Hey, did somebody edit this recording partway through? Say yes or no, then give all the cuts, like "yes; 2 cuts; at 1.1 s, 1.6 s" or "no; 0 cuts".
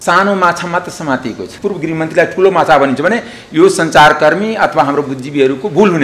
yes; 1 cut; at 1.5 s